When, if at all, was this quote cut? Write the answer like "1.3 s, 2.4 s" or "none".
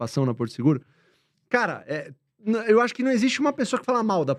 none